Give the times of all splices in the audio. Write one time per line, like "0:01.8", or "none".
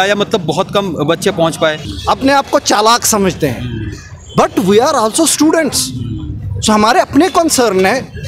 0:01.9